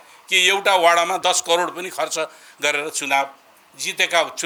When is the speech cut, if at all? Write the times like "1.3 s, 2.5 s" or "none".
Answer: none